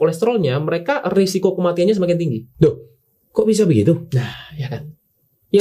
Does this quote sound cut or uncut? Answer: uncut